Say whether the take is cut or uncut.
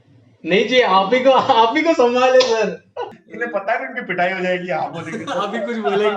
cut